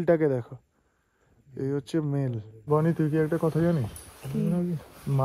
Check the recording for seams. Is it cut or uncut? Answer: cut